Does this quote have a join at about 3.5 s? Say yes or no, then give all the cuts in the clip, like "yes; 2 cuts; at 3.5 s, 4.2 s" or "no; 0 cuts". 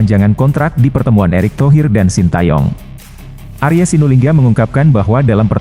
no; 0 cuts